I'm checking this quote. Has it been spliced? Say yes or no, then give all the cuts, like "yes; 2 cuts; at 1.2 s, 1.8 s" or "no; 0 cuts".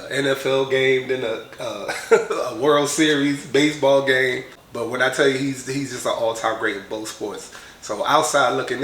yes; 1 cut; at 4.6 s